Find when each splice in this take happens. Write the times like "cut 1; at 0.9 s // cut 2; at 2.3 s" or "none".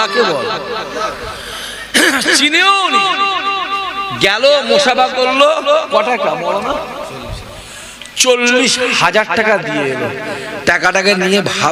none